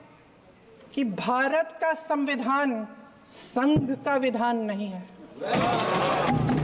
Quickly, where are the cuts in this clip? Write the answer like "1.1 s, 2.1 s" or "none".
none